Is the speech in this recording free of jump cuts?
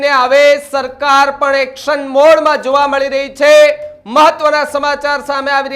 yes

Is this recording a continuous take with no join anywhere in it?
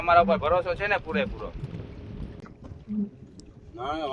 no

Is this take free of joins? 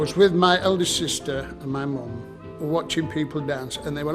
no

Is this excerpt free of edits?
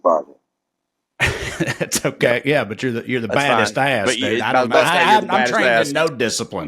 yes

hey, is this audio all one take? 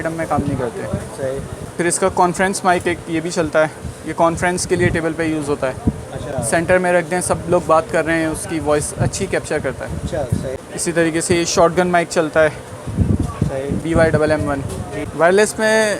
no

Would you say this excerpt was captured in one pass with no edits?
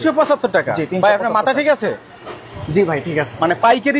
yes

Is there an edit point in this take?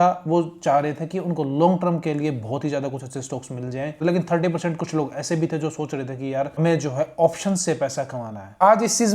no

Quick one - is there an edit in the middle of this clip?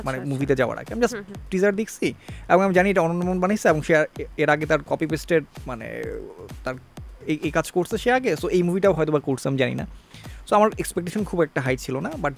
no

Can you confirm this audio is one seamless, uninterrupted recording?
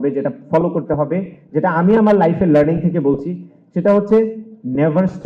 yes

